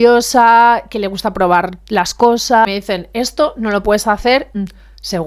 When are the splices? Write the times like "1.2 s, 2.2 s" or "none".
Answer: 2.7 s, 4.5 s